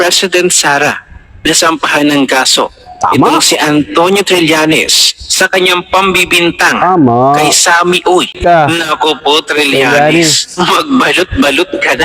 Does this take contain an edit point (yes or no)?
yes